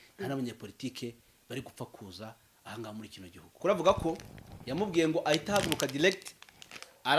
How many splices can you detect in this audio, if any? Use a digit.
1